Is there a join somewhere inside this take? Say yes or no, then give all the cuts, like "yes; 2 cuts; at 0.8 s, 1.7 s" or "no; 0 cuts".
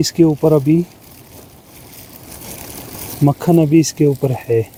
no; 0 cuts